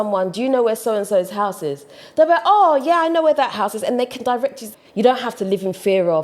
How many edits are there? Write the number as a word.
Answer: one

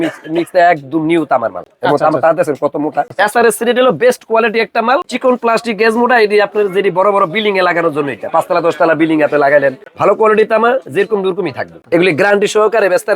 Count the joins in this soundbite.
four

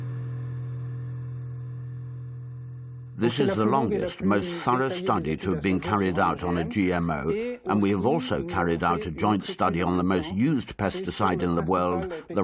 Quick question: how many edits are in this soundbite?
zero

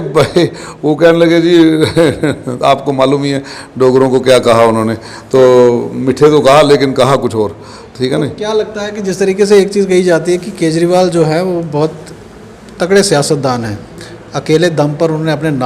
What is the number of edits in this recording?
zero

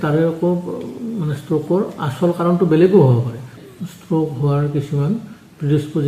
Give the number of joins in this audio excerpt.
one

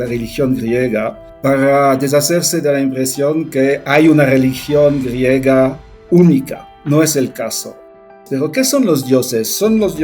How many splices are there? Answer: three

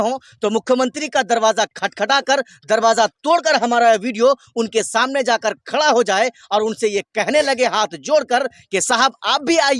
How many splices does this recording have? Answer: zero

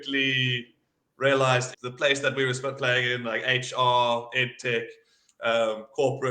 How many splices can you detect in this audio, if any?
one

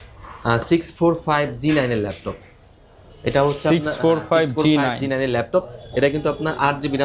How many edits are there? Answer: zero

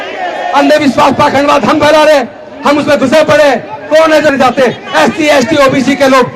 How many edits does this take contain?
one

